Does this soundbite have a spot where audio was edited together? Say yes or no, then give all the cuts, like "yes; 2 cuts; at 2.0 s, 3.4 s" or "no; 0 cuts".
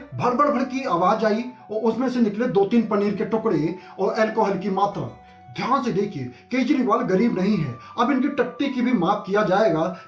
no; 0 cuts